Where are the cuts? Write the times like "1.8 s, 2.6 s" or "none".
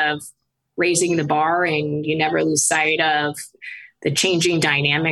none